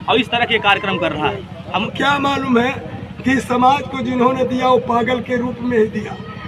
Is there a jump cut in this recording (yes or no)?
yes